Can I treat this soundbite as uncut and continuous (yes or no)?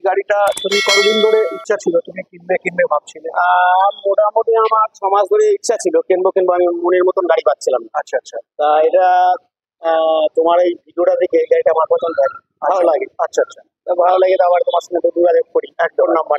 no